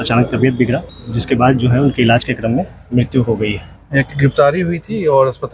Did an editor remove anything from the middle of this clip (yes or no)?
yes